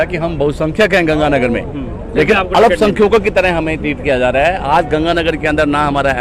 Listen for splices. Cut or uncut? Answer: uncut